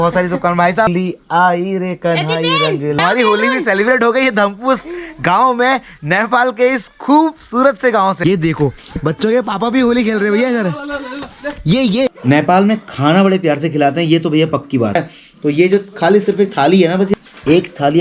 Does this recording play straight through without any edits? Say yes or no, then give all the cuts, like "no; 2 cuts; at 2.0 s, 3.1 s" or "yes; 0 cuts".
no; 6 cuts; at 0.9 s, 3.0 s, 8.2 s, 12.1 s, 15.0 s, 17.1 s